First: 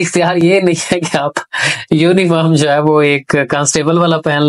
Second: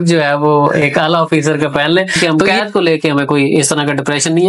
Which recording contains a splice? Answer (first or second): second